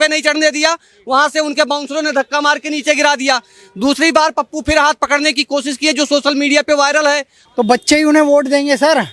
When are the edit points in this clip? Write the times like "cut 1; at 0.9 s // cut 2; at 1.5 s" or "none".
cut 1; at 7.4 s